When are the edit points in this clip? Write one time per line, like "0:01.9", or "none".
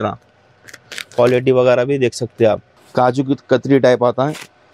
0:02.8